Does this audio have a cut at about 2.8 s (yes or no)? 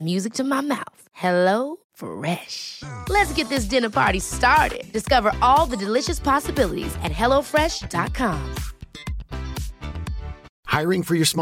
no